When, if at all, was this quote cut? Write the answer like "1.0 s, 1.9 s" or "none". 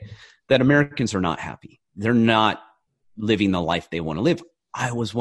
none